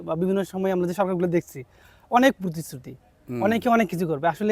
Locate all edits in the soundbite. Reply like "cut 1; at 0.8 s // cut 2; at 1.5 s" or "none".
none